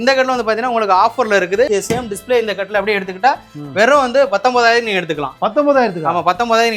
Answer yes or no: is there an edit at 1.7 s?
yes